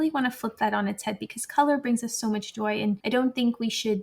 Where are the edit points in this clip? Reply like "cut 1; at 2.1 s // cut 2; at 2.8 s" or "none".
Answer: cut 1; at 3.0 s